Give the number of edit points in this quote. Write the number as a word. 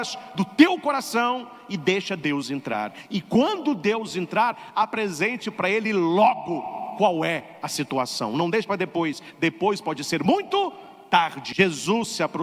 one